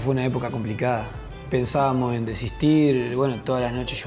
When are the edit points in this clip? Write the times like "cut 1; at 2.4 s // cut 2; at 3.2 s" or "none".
none